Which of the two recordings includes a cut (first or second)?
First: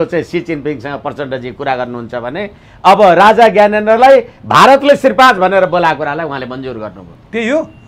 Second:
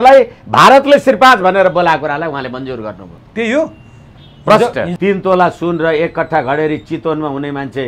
second